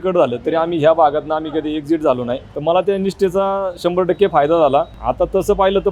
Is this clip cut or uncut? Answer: cut